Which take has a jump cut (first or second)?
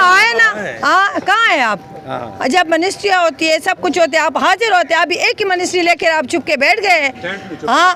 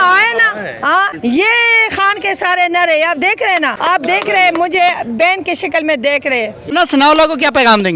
second